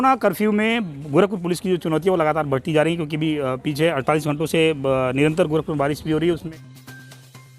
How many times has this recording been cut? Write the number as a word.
one